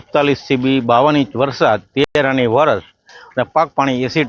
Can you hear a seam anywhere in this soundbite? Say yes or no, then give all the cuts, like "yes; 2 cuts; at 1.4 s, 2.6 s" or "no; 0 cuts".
no; 0 cuts